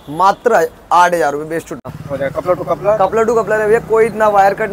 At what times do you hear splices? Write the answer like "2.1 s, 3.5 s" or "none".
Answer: 1.8 s